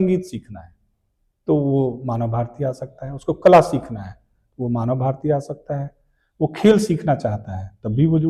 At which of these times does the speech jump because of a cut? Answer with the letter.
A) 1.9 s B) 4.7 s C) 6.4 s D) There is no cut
D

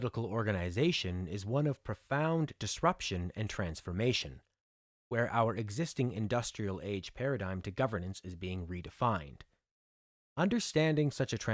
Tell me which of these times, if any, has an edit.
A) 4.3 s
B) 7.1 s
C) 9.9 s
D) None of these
B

